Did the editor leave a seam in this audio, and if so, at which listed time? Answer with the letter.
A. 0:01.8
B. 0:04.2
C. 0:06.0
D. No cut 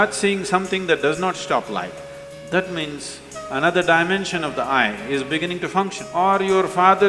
C